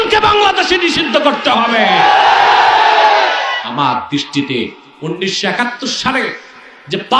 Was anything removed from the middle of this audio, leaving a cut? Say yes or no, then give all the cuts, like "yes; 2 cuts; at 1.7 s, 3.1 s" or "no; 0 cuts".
yes; 1 cut; at 3.6 s